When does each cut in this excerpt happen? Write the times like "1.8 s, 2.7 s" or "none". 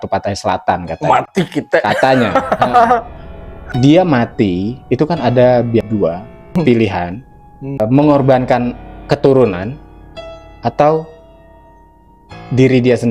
3.7 s, 5.9 s, 7.8 s